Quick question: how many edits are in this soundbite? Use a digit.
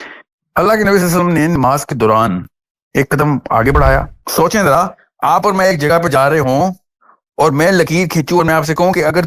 1